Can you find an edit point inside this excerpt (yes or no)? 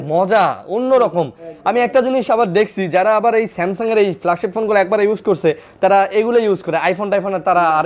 no